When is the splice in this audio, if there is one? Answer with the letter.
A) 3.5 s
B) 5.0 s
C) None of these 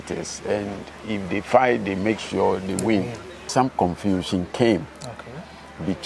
A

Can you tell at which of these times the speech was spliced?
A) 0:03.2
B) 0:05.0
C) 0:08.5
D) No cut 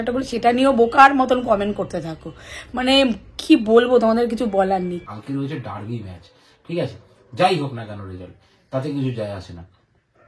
B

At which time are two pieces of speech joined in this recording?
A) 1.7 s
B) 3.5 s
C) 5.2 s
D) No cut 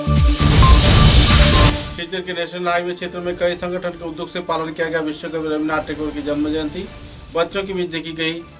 A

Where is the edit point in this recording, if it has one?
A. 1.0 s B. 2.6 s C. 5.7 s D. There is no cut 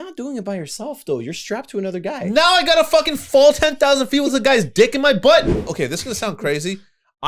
C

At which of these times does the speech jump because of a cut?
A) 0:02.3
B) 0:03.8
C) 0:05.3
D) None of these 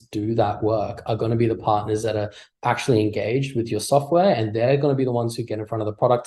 D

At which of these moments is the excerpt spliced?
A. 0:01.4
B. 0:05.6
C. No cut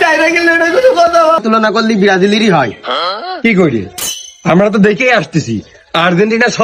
A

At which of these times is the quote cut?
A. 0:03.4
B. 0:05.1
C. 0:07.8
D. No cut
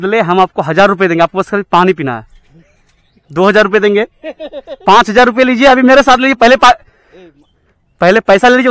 D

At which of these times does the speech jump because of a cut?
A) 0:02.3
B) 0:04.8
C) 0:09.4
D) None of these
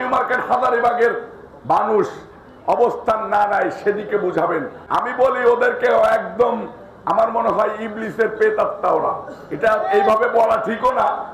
B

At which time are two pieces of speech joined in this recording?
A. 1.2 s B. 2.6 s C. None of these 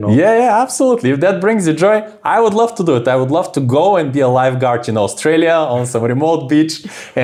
C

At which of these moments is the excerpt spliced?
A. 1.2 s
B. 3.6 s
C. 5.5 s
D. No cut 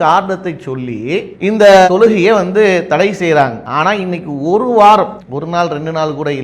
B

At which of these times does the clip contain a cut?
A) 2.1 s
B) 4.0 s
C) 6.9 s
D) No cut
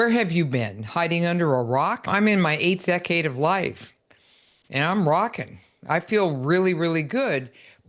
A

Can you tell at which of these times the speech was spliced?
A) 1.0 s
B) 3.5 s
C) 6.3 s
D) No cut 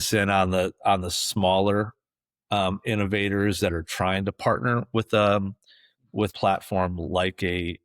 C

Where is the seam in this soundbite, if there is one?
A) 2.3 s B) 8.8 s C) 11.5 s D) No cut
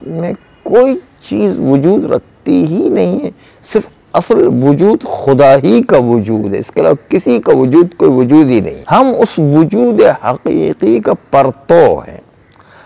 B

